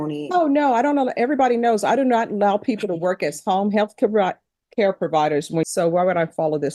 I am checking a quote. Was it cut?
yes; 1 cut; at 5.6 s

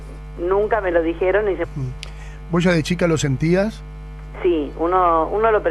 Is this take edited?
no; 0 cuts

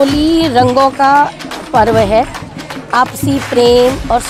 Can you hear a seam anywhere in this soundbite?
no; 0 cuts

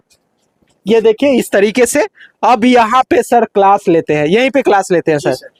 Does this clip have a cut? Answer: no; 0 cuts

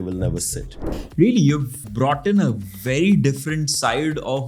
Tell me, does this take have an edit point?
yes; 2 cuts; at 0.9 s, 1.8 s

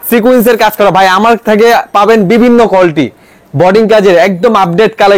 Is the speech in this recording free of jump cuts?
yes; 0 cuts

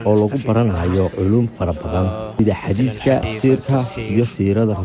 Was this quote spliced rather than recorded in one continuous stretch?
yes; 3 cuts; at 1.1 s, 2.3 s, 3.3 s

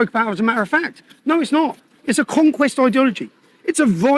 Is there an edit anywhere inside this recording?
no; 0 cuts

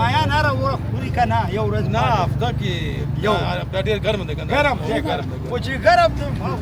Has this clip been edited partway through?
no; 0 cuts

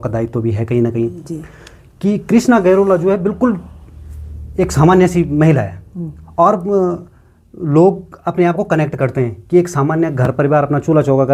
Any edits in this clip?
no; 0 cuts

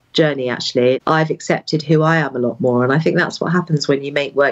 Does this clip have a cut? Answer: yes; 1 cut; at 1.0 s

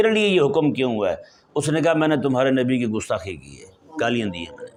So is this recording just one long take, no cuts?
yes; 0 cuts

